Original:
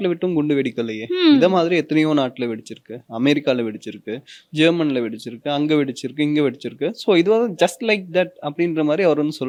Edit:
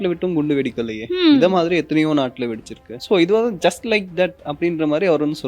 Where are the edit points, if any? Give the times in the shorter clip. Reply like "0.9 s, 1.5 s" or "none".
3.0 s